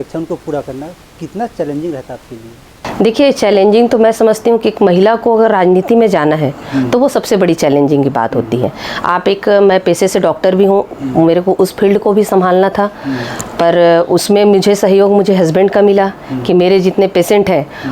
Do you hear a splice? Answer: no; 0 cuts

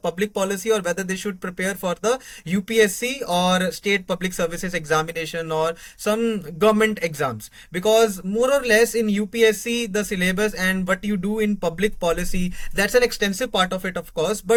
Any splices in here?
no; 0 cuts

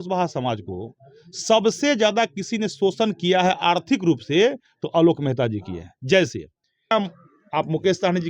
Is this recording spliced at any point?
yes; 1 cut; at 6.9 s

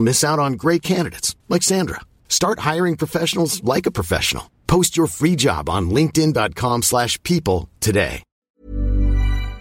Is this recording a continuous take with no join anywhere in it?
no; 1 cut; at 8.6 s

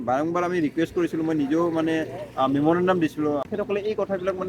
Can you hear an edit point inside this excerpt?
yes; 1 cut; at 3.5 s

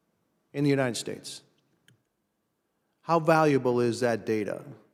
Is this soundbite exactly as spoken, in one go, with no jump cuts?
yes; 0 cuts

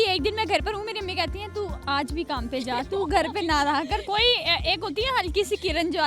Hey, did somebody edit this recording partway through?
yes; 1 cut; at 4.0 s

